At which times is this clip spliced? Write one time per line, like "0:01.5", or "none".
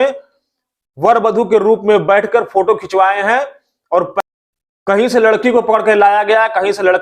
0:04.2